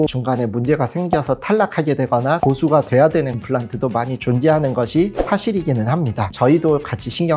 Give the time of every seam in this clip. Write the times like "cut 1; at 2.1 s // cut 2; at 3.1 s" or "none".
cut 1; at 6.3 s